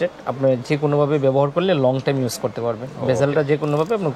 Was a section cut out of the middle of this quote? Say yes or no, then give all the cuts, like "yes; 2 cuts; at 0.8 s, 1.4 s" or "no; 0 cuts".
no; 0 cuts